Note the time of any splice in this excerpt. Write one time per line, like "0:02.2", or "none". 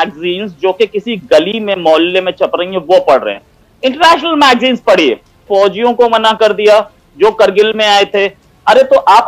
0:05.4